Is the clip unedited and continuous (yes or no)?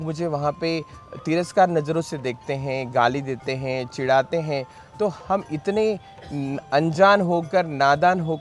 yes